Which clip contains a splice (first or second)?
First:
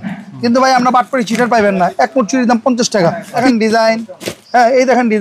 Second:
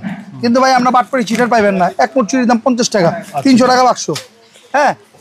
first